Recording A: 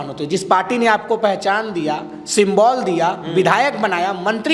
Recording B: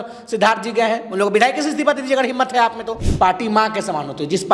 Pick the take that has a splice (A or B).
B